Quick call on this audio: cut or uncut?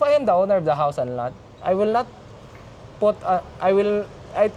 uncut